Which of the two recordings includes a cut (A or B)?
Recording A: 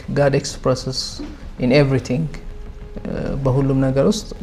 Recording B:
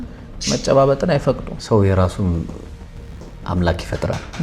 B